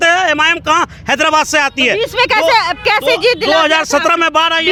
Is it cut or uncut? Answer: uncut